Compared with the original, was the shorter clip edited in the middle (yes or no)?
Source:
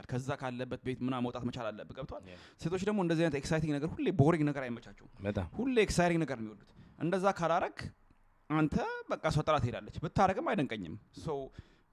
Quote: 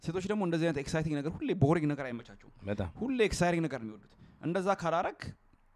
no